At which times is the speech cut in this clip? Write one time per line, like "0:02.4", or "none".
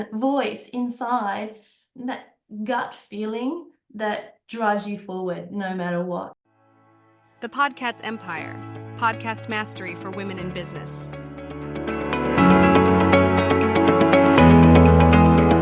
0:06.3